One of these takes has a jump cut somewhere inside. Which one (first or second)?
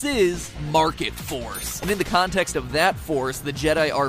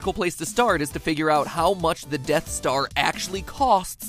first